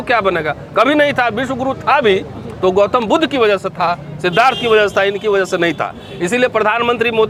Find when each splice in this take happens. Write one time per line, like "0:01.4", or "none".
none